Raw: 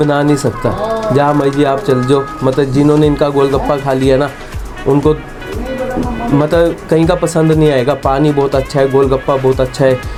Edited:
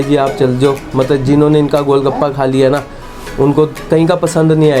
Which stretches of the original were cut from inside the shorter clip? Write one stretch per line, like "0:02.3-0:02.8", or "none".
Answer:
0:05.3-0:06.8